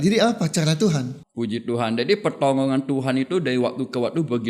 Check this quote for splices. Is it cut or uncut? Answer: cut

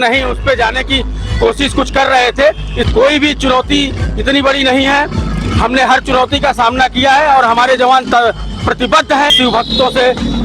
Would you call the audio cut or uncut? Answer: cut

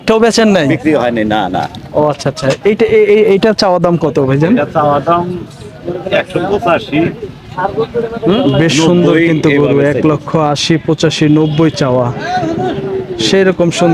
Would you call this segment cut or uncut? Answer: uncut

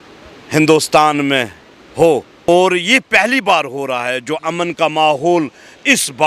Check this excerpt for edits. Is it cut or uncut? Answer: cut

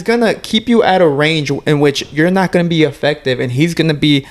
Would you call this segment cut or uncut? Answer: uncut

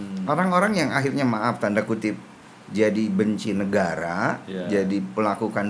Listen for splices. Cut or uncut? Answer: uncut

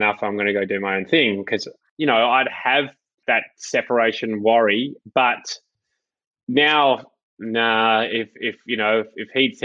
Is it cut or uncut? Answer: cut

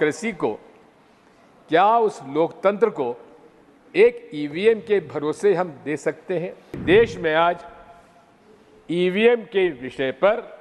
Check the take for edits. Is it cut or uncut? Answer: cut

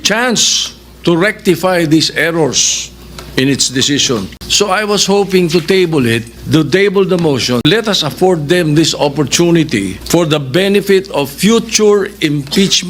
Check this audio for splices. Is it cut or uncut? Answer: cut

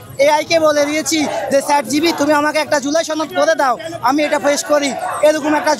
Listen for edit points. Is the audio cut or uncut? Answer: uncut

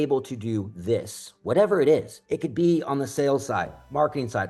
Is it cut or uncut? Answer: cut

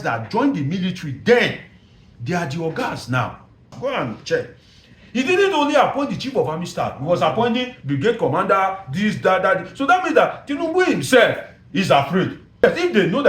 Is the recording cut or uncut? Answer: cut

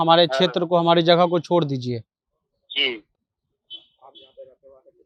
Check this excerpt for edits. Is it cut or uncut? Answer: uncut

